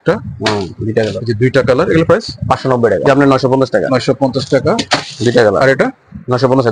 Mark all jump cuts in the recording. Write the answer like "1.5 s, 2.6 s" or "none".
3.1 s

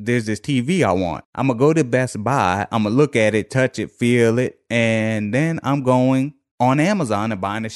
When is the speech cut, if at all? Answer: 1.2 s

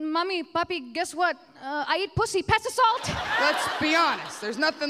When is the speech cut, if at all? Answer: 3.2 s

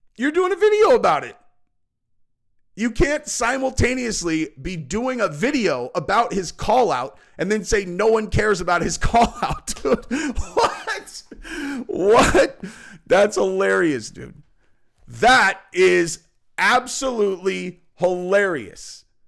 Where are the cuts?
none

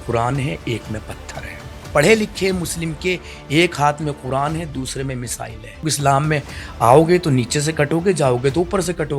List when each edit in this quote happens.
1.8 s, 5.8 s

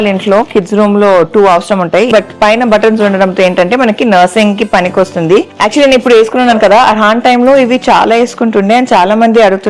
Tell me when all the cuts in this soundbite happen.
2.1 s, 5.5 s

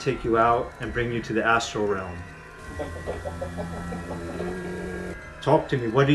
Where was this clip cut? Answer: 5.2 s

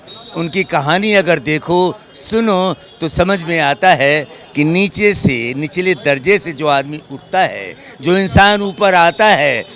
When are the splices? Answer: none

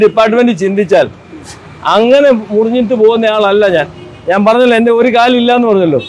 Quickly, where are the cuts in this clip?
none

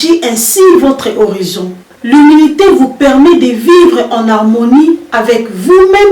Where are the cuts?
1.8 s

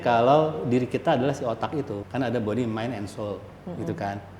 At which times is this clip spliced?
2.0 s

